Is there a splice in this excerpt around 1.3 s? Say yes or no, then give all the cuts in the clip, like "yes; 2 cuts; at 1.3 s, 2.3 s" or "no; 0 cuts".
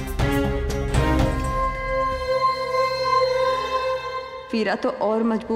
yes; 1 cut; at 1.3 s